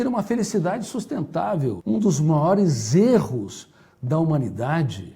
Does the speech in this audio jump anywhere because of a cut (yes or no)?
yes